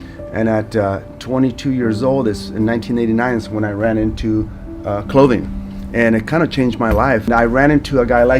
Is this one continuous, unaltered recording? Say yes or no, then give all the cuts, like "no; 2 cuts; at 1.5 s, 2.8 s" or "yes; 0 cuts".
no; 1 cut; at 7.3 s